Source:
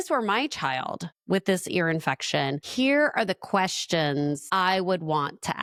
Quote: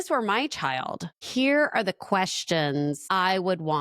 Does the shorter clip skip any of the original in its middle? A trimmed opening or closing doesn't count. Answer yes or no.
yes